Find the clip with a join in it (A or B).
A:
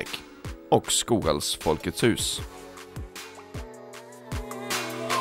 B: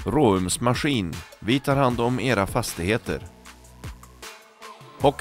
A